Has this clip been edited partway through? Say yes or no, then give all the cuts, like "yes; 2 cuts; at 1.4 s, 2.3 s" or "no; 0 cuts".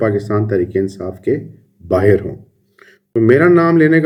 no; 0 cuts